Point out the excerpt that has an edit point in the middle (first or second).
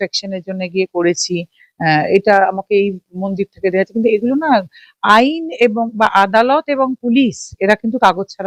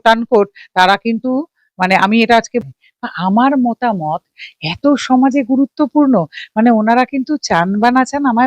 second